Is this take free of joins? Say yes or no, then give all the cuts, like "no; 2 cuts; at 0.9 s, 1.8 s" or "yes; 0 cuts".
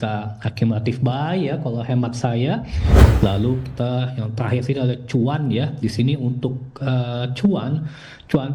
no; 1 cut; at 2.8 s